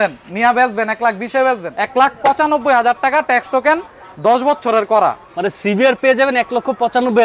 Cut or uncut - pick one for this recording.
cut